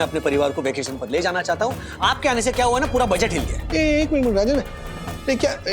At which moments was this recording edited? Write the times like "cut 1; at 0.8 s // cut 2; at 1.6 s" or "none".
cut 1; at 3.5 s